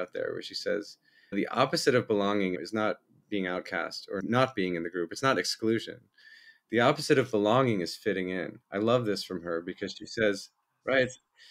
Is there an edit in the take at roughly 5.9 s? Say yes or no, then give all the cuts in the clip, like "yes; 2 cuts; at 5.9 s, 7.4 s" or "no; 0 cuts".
no; 3 cuts; at 1.3 s, 2.6 s, 4.2 s